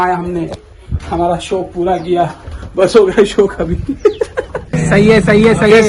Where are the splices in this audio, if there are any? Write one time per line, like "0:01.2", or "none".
0:04.9